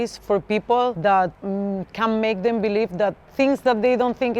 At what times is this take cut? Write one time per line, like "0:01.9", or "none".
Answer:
0:01.0